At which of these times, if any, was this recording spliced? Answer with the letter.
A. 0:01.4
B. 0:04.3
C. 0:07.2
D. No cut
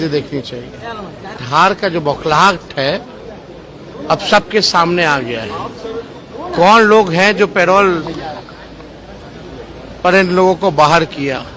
A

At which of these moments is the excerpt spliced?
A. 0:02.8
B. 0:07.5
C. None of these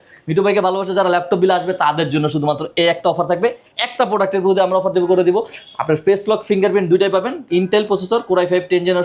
B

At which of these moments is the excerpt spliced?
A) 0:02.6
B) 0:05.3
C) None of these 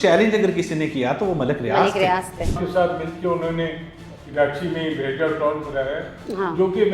A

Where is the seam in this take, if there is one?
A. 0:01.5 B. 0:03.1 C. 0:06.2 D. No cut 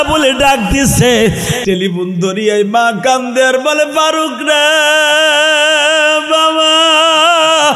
A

